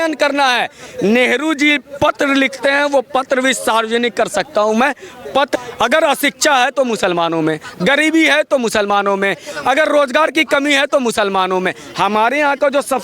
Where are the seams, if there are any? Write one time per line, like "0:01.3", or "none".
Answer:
0:05.5